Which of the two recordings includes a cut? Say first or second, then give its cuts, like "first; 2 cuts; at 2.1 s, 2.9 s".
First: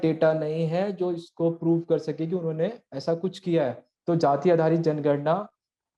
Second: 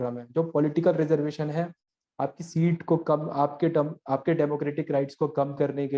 first; 1 cut; at 3.9 s